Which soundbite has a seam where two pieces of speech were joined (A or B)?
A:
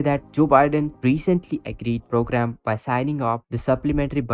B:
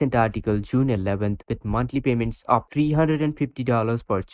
B